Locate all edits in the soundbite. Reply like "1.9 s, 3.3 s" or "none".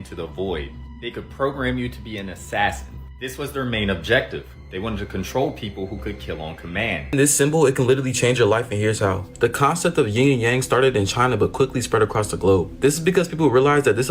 7.1 s